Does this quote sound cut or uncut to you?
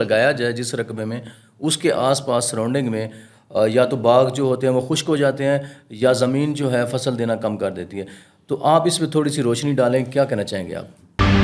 uncut